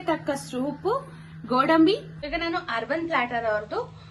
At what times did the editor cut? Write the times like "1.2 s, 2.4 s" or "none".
2.1 s